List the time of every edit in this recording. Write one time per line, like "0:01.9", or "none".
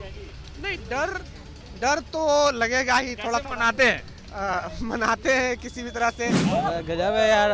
0:06.4